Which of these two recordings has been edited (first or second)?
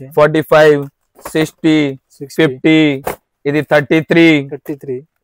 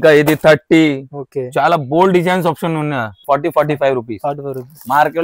second